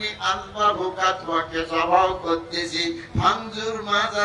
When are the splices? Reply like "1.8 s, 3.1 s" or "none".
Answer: none